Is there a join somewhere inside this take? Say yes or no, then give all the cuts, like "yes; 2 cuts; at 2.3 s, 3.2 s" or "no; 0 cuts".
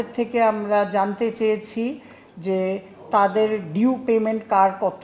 no; 0 cuts